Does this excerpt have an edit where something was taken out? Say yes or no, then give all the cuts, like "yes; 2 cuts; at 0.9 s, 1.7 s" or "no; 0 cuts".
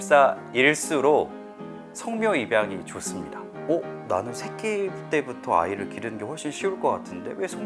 no; 0 cuts